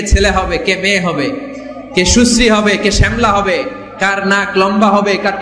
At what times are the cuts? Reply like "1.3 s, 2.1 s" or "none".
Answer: none